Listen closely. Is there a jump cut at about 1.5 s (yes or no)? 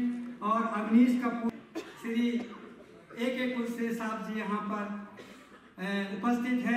yes